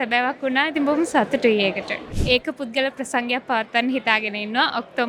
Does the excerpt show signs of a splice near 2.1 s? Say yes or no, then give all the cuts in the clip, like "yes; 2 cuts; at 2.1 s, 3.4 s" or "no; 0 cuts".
yes; 1 cut; at 2.1 s